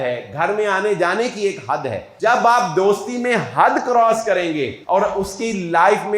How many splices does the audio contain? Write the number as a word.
two